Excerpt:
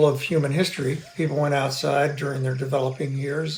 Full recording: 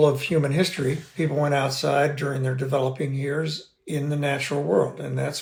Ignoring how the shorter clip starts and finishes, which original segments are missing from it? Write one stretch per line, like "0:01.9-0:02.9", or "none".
none